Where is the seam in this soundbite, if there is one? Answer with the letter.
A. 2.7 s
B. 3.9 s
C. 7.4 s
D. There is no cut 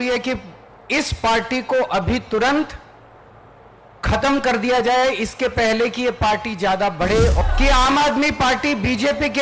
C